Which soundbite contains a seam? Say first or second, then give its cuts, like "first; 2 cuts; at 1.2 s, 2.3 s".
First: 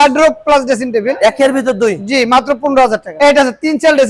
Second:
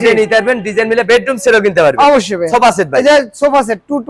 first; 1 cut; at 3.1 s